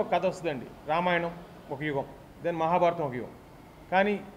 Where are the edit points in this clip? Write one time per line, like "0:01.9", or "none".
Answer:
none